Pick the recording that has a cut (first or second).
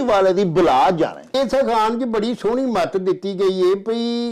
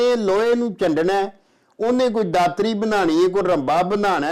first